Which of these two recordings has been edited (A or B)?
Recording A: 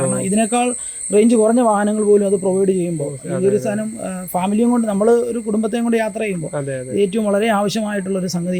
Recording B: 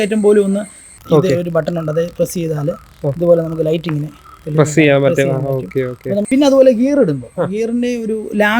B